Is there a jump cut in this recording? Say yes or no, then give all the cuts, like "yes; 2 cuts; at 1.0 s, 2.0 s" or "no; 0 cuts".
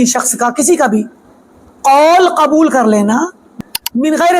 yes; 1 cut; at 3.4 s